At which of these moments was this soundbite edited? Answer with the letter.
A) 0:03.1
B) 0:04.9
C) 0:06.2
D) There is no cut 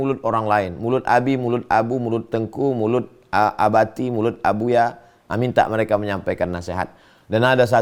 D